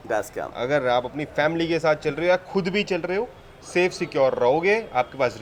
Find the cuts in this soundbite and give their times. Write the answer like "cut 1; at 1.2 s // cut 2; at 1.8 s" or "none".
none